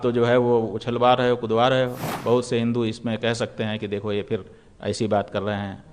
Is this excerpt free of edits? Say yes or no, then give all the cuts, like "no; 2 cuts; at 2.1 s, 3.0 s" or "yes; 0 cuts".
no; 1 cut; at 2.1 s